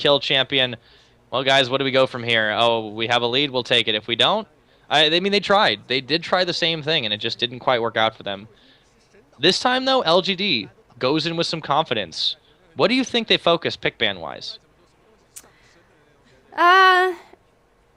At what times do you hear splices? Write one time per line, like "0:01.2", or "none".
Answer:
none